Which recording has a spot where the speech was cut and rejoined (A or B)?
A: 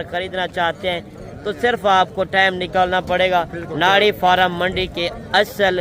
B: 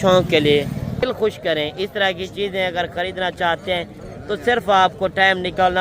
B